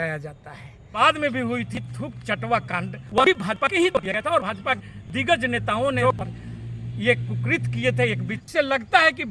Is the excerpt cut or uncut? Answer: cut